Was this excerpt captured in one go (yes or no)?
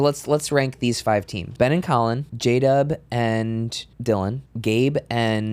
no